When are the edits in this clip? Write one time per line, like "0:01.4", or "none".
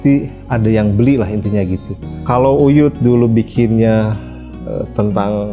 0:02.2